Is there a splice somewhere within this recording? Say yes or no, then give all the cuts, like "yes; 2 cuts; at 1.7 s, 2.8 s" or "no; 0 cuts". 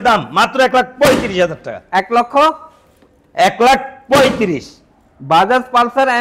no; 0 cuts